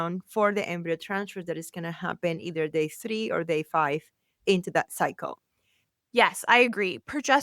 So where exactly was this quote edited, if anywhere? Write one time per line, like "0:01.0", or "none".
0:05.8